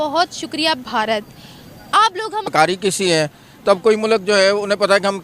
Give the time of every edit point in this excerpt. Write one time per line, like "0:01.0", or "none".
0:02.5